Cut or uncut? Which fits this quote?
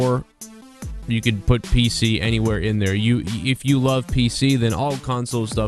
cut